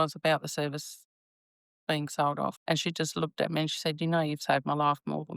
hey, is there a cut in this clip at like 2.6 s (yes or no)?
yes